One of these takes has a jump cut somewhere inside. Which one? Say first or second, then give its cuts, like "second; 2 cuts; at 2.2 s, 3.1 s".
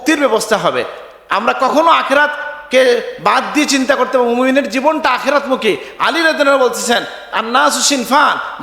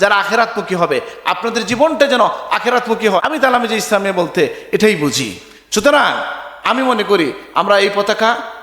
second; 1 cut; at 3.2 s